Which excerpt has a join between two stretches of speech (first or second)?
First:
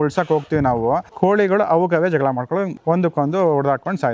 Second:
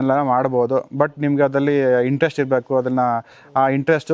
first